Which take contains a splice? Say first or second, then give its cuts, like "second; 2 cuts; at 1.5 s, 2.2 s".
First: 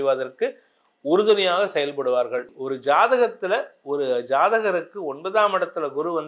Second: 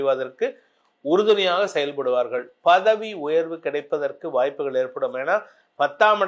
first; 1 cut; at 2.5 s